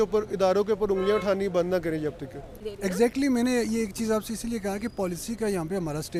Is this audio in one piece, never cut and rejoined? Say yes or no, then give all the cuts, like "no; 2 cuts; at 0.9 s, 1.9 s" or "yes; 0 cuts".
yes; 0 cuts